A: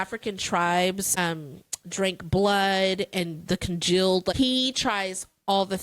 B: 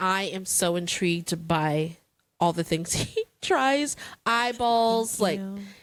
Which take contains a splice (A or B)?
A